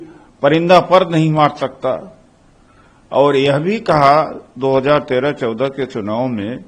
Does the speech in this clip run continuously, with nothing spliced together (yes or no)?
yes